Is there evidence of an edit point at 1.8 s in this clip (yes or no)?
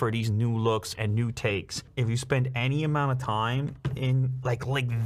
yes